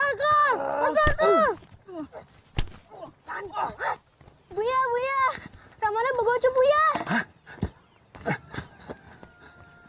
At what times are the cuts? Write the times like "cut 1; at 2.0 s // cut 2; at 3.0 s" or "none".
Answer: none